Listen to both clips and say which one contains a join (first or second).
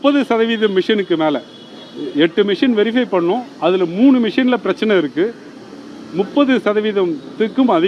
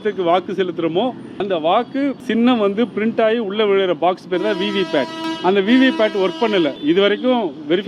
second